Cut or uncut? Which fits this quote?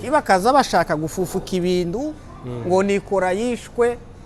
uncut